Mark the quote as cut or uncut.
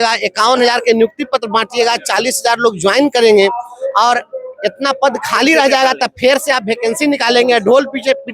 uncut